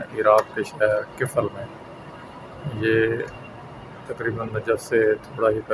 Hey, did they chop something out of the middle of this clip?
no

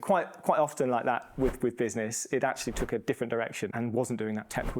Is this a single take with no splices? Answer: no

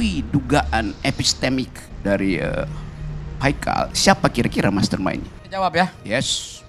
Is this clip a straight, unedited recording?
no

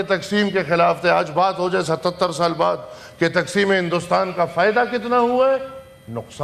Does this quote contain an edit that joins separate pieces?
no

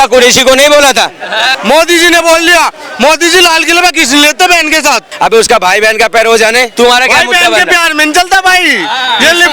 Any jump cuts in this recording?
yes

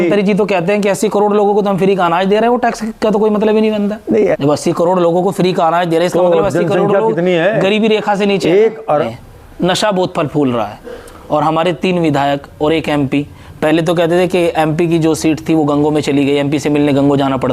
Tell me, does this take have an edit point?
yes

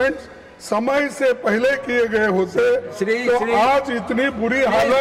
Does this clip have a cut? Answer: no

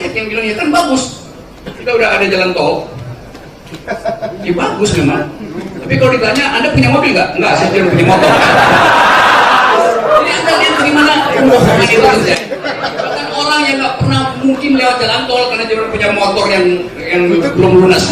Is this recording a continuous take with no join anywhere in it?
no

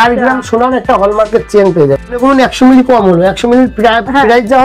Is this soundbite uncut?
no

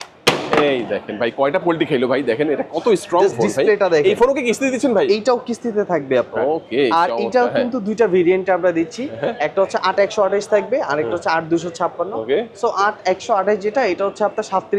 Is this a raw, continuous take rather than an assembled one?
yes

